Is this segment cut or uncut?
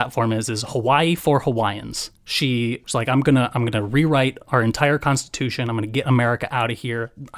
cut